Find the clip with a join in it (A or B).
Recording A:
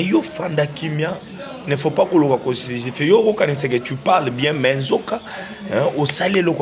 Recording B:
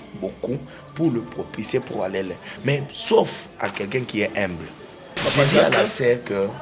B